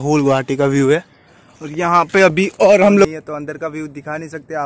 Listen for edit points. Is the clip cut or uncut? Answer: cut